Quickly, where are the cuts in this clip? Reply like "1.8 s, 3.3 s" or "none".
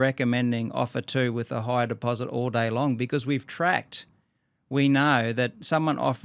none